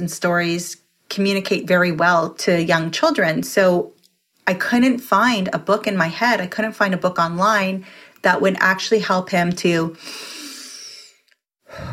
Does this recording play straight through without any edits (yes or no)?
no